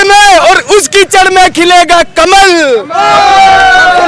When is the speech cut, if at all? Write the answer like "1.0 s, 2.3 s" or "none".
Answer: none